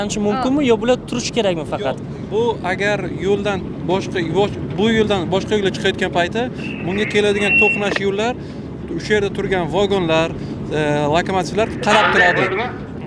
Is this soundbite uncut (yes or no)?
yes